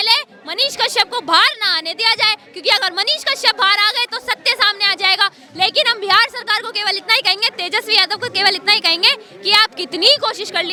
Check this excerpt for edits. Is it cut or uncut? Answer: uncut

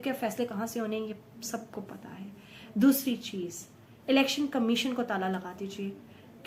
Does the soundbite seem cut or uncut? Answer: uncut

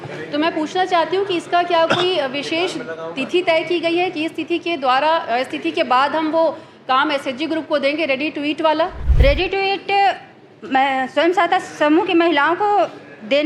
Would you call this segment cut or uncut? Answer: cut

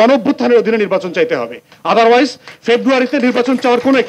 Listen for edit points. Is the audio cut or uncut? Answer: uncut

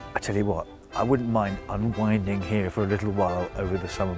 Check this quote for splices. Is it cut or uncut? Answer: uncut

